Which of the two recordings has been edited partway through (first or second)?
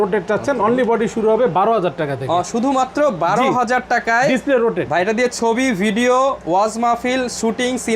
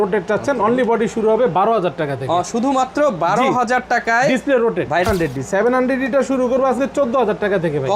second